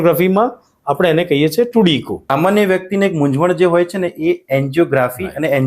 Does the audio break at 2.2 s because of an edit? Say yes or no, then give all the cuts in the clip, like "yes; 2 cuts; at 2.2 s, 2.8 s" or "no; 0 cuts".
yes; 1 cut; at 2.2 s